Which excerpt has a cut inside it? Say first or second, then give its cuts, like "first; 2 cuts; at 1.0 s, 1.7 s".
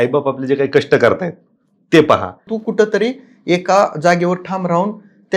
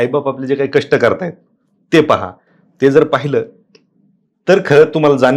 first; 1 cut; at 2.6 s